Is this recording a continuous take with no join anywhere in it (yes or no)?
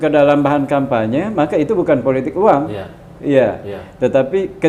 yes